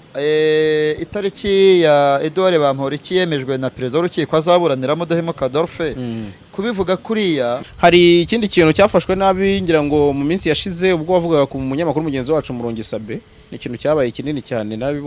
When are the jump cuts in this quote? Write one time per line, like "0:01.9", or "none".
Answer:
0:07.6